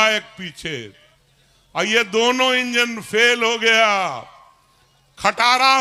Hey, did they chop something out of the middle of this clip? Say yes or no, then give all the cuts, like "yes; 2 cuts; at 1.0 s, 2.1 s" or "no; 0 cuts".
no; 0 cuts